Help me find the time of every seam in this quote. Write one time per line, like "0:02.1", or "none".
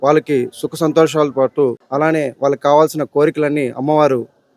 0:01.8